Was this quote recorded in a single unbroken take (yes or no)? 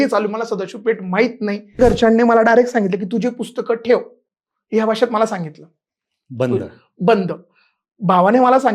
no